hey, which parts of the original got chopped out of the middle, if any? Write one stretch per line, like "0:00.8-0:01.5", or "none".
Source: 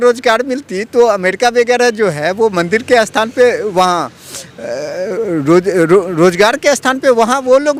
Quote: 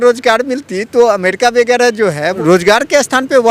0:02.4-0:06.1

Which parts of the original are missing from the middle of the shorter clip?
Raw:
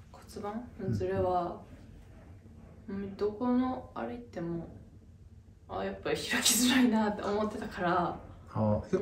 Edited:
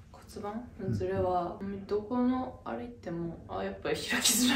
0:01.6-0:02.9
0:04.7-0:05.6

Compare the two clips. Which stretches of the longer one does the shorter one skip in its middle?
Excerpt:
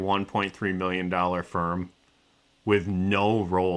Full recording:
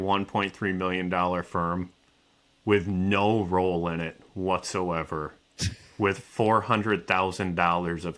none

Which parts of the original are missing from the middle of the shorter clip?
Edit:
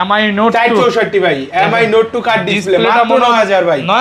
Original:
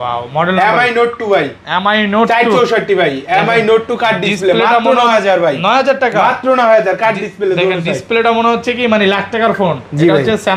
none

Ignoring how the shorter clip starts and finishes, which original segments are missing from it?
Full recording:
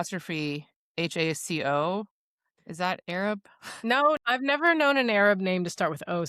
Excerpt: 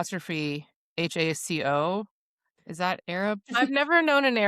0:03.5-0:04.2

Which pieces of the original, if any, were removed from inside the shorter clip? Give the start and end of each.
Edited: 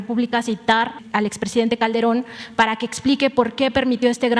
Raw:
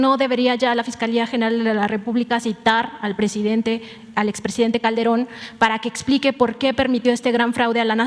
0:03.0-0:04.0

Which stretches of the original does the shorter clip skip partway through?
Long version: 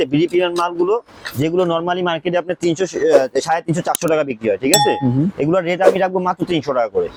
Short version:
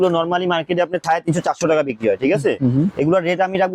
0:02.6-0:03.4

